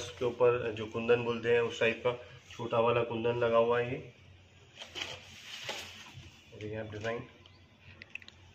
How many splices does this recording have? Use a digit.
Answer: 0